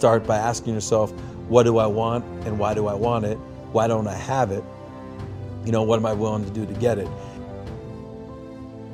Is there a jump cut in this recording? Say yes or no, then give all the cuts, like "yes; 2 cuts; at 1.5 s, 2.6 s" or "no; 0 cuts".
no; 0 cuts